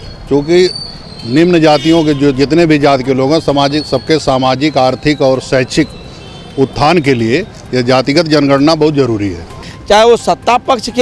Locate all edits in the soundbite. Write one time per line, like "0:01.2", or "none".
0:09.7